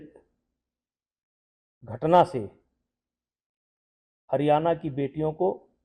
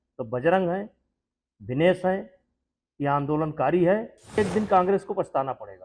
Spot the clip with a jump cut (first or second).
second